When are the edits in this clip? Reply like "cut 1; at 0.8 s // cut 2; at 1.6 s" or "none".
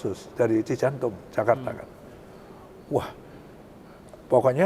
none